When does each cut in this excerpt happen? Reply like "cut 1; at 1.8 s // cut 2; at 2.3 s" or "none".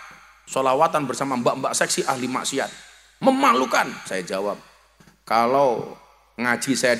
none